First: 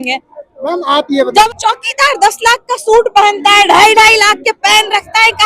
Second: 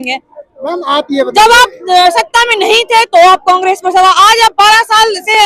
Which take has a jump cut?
first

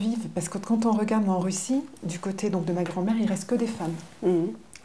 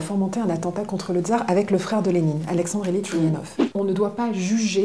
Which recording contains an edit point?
second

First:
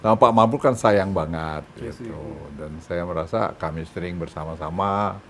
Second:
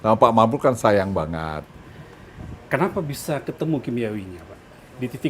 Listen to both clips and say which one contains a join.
second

